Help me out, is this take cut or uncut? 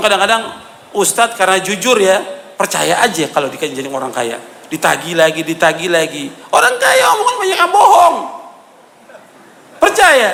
uncut